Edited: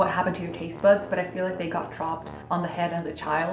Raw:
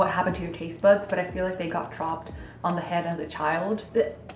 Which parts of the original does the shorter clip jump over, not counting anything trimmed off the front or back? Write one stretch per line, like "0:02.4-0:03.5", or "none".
0:02.3-0:02.5